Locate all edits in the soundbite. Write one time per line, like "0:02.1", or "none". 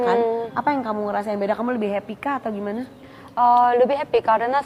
none